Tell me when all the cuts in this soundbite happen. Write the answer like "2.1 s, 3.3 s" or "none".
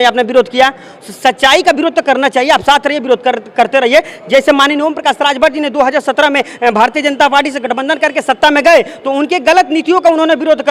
none